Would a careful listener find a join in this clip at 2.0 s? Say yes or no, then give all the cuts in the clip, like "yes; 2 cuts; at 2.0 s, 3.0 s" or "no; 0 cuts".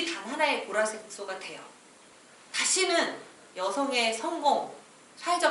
yes; 1 cut; at 2.0 s